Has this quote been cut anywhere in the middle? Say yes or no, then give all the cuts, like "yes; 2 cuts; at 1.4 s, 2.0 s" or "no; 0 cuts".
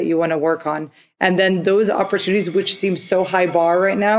no; 0 cuts